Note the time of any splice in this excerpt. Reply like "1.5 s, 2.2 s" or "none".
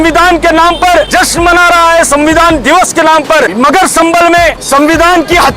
1.1 s, 3.5 s, 4.6 s